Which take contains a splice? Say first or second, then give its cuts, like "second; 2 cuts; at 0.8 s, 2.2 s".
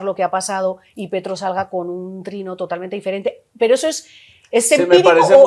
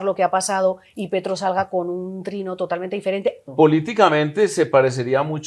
second; 1 cut; at 3.4 s